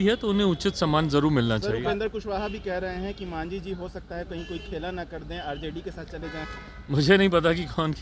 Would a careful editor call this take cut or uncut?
uncut